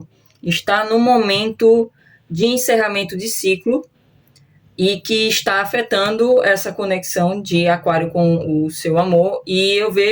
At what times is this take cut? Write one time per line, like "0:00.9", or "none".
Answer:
none